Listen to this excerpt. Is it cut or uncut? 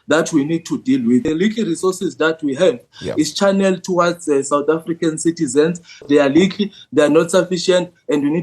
cut